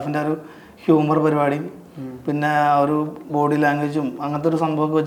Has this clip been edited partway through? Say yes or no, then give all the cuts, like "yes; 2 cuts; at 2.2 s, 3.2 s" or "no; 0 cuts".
no; 0 cuts